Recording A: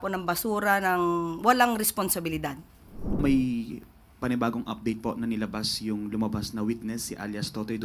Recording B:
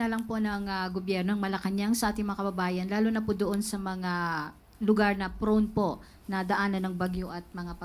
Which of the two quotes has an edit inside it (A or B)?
A